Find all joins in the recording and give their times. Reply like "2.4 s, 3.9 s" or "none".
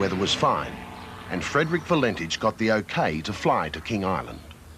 none

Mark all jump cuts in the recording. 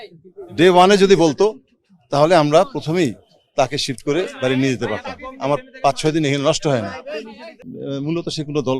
7.7 s

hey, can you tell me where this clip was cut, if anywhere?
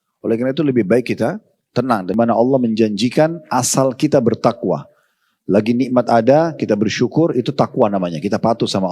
2.2 s

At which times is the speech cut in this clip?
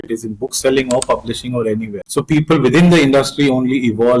2.0 s

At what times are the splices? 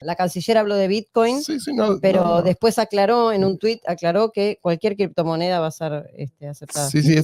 none

